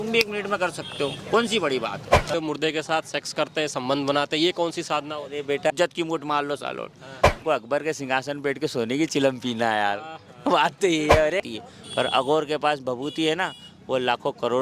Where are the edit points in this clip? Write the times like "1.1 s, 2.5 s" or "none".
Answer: 2.3 s, 5.7 s, 7.4 s, 11.5 s

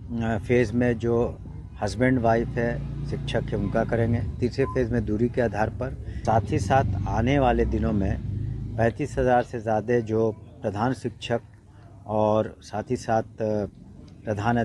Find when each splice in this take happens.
6.1 s

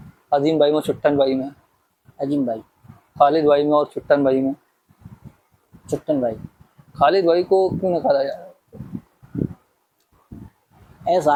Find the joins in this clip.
none

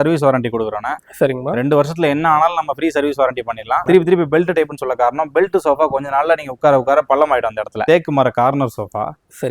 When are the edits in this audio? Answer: 3.8 s, 7.8 s

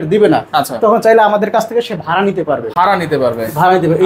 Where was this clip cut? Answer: none

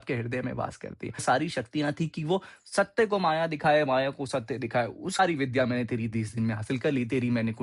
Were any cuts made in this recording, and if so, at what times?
1.2 s, 5.2 s

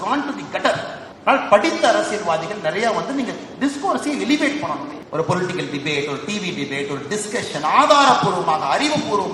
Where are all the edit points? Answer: 1.0 s, 5.0 s

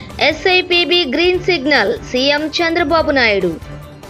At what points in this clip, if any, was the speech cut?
none

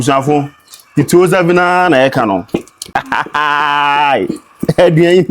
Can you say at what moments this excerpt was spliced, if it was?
2.8 s

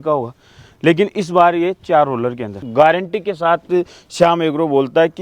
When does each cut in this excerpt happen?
2.6 s

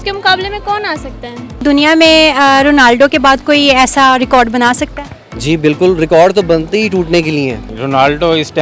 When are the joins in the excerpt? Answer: 1.6 s, 7.7 s

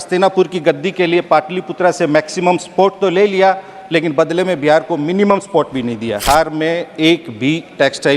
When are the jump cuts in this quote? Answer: 6.2 s

